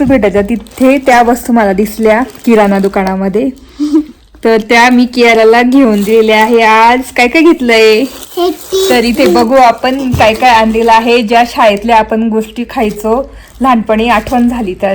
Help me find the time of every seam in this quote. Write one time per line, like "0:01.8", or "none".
none